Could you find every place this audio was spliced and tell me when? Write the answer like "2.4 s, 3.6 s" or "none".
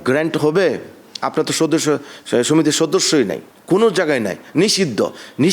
none